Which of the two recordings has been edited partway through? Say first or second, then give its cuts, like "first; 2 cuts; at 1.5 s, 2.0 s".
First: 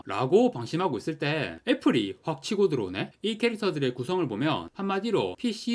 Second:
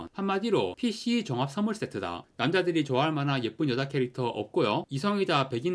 first; 1 cut; at 3.1 s